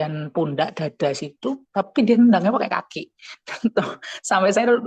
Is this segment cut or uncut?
uncut